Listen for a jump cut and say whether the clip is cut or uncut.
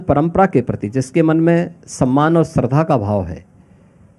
uncut